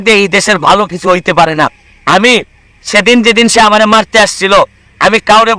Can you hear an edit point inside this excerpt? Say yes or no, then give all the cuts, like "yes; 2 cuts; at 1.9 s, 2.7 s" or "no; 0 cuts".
no; 0 cuts